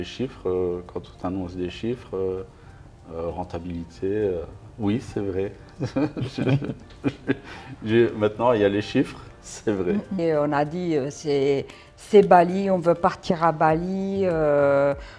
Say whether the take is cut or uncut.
cut